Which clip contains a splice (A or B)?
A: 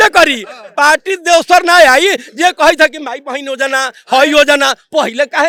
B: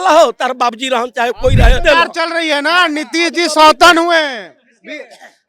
B